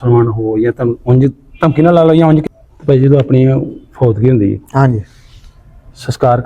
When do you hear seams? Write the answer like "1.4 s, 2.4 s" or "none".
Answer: 2.4 s